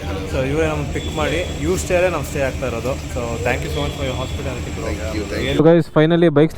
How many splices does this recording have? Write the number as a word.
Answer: one